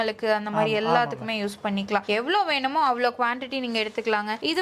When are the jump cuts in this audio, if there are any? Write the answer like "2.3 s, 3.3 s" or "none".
none

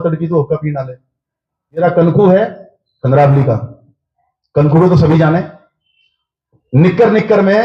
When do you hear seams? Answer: 1.8 s

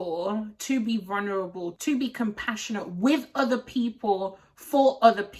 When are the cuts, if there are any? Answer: none

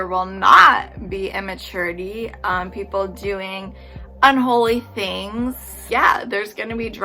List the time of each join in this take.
none

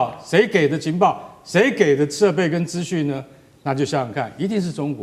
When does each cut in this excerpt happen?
none

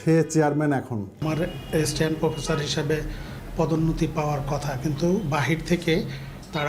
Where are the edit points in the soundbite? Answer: 1.2 s

